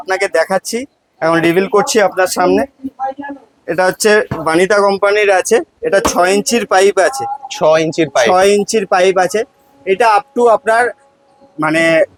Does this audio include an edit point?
no; 0 cuts

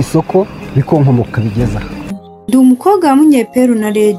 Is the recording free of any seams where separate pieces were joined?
no; 1 cut; at 2.2 s

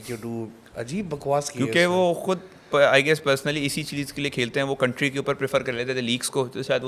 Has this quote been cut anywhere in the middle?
no; 0 cuts

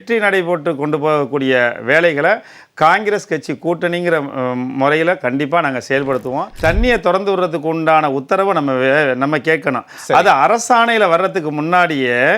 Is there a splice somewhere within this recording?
yes; 1 cut; at 6.5 s

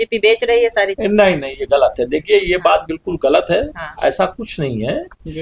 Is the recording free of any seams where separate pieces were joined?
yes; 0 cuts

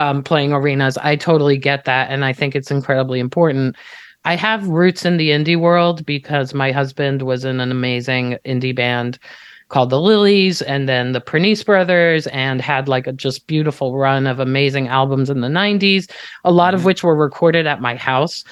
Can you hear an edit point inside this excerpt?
no; 0 cuts

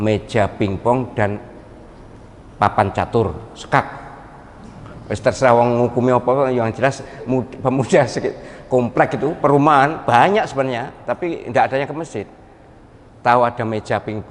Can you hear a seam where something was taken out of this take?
no; 0 cuts

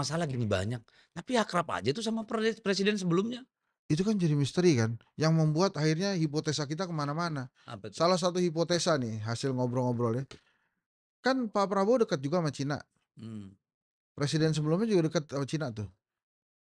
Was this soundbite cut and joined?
no; 0 cuts

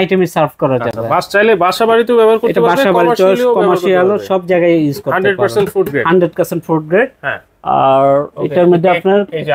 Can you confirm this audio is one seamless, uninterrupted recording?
yes; 0 cuts

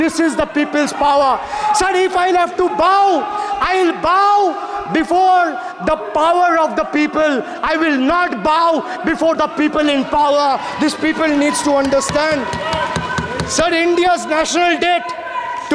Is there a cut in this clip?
no; 0 cuts

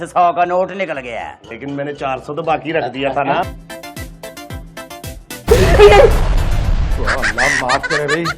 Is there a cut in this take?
yes; 1 cut; at 3.6 s

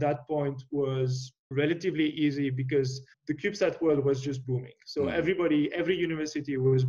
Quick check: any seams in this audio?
yes; 3 cuts; at 1.5 s, 3.1 s, 4.4 s

